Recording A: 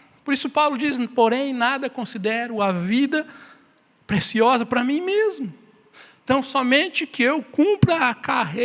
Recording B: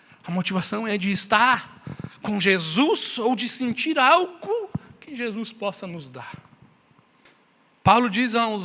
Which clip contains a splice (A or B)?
B